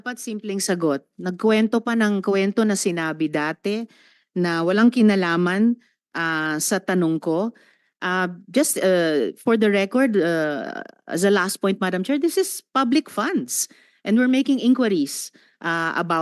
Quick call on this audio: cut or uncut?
uncut